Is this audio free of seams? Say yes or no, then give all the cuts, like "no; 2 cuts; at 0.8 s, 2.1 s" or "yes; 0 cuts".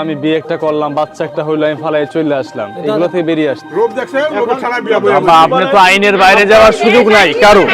no; 1 cut; at 3.6 s